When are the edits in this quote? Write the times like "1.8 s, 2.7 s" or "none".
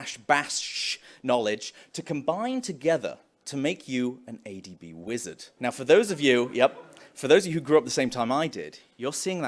5.4 s